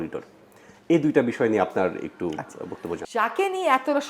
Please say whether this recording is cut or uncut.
cut